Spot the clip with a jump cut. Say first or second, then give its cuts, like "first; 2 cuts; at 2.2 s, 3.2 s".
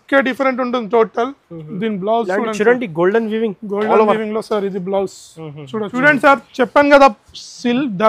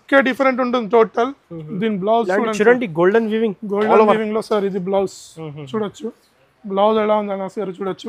first; 1 cut; at 5.9 s